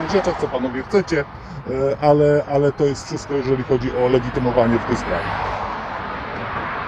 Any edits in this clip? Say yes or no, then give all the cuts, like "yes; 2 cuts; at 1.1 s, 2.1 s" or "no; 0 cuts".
no; 0 cuts